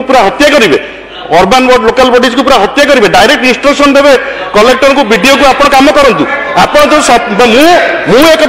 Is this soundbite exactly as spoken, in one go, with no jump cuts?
yes; 0 cuts

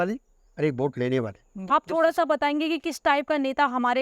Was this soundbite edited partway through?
yes; 1 cut; at 1.7 s

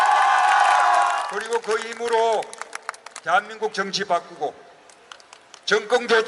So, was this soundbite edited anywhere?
yes; 1 cut; at 1.2 s

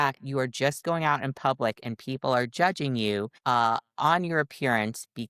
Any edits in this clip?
yes; 1 cut; at 3.3 s

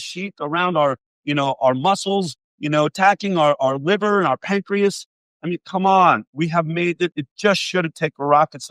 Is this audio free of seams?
no; 1 cut; at 7.1 s

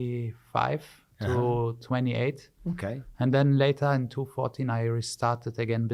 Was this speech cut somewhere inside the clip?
no; 0 cuts

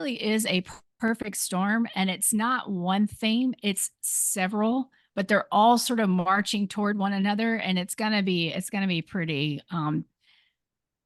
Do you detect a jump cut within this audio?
no; 0 cuts

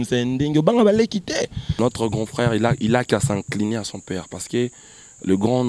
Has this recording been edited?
yes; 1 cut; at 1.8 s

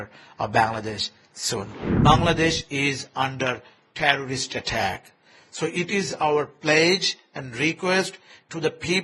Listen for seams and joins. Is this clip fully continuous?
no; 1 cut; at 1.8 s

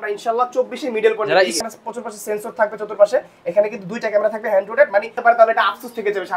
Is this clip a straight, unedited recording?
no; 2 cuts; at 1.6 s, 5.2 s

